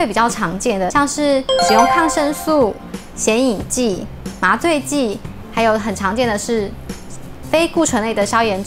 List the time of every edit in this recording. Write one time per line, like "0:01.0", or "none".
0:00.9